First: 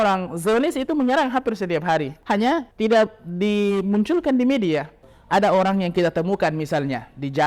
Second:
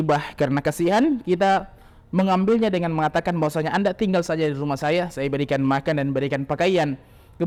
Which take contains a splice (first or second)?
first